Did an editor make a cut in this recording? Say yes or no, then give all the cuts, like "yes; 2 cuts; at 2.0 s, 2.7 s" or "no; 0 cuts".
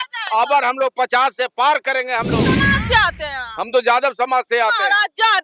yes; 1 cut; at 2.6 s